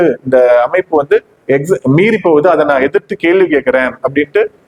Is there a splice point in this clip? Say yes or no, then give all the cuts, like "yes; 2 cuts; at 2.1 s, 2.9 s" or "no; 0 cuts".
no; 0 cuts